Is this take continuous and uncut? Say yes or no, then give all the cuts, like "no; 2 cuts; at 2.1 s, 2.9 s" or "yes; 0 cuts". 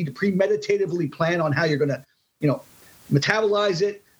yes; 0 cuts